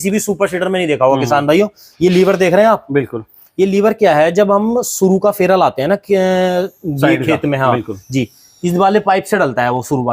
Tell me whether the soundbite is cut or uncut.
uncut